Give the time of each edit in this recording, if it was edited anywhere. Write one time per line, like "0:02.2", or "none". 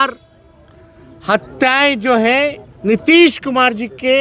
0:03.0